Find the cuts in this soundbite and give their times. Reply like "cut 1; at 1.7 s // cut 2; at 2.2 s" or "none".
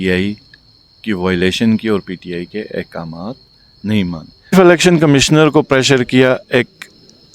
cut 1; at 4.5 s